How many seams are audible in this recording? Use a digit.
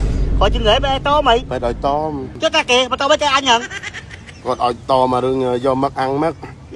1